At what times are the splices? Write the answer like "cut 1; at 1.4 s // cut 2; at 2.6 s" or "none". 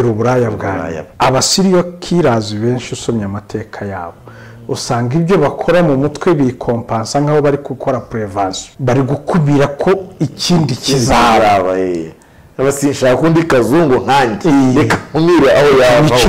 cut 1; at 1.0 s // cut 2; at 8.7 s